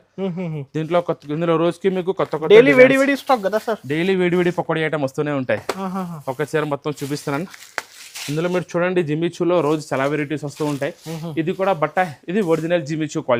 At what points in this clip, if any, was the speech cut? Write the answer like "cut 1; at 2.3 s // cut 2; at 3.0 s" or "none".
none

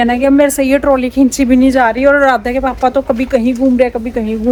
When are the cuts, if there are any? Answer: none

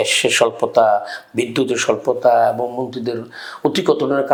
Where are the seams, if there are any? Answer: none

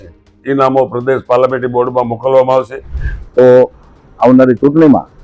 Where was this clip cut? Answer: cut 1; at 3.1 s

